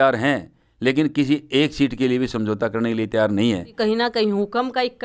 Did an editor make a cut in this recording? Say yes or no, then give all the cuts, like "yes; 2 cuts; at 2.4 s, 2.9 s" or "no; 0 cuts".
yes; 1 cut; at 3.7 s